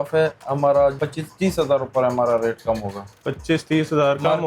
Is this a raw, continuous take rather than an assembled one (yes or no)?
no